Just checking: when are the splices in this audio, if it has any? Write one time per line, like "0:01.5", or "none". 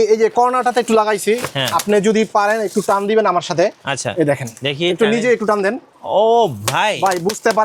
none